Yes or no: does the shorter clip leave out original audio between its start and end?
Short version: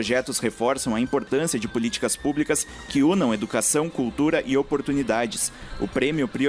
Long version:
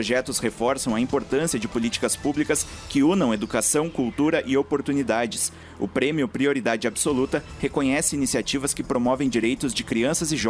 no